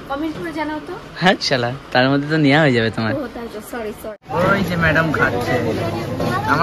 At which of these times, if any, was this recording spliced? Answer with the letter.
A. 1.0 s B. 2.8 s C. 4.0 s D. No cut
C